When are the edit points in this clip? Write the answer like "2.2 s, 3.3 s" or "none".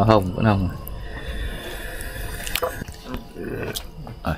2.9 s